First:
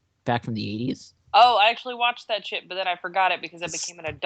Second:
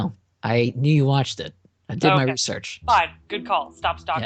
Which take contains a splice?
first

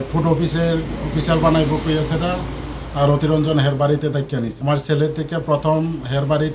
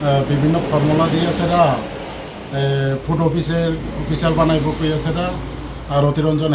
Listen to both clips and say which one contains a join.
first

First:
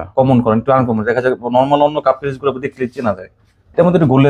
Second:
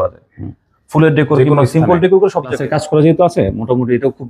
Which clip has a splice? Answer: second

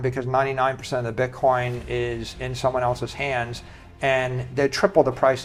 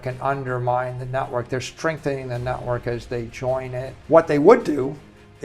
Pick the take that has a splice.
second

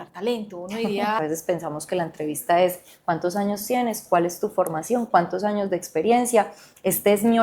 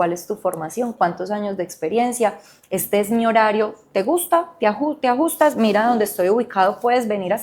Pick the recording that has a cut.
first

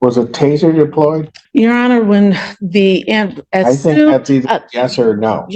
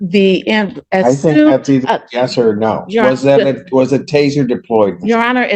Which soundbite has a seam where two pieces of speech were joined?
first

